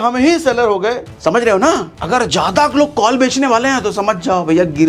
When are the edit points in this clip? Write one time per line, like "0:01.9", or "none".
0:01.1
0:01.9